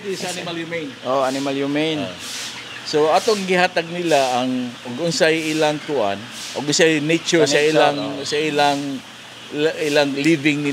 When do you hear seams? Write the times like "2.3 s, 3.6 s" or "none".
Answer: none